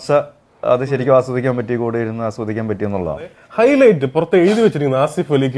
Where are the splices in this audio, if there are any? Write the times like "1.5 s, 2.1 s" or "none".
3.4 s

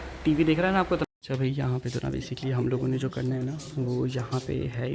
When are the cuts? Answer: 1.0 s

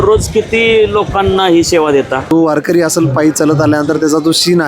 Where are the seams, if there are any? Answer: 2.3 s

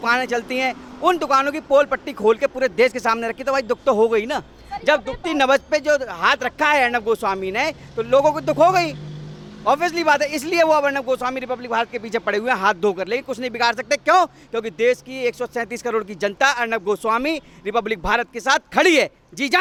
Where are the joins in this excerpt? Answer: none

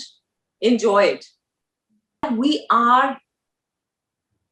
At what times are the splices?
2.2 s

